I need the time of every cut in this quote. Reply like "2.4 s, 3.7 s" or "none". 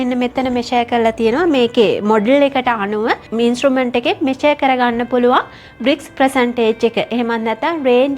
none